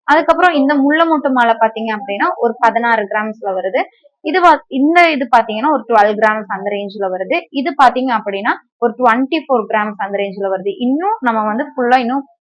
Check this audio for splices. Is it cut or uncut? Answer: uncut